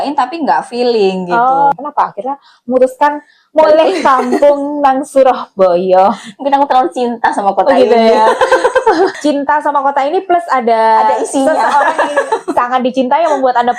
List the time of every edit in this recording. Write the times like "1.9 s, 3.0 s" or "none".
1.7 s, 9.2 s